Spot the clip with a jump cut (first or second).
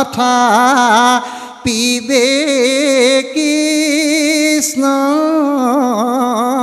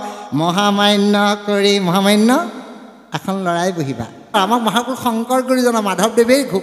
second